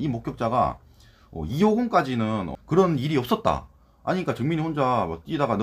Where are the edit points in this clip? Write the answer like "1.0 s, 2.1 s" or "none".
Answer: 2.5 s